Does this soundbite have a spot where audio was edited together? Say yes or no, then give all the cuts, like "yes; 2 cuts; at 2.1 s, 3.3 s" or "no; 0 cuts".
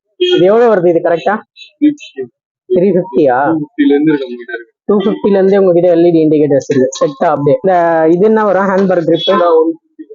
yes; 1 cut; at 7.7 s